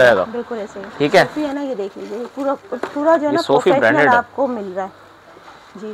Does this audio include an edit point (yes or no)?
yes